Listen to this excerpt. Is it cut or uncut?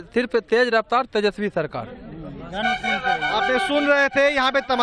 uncut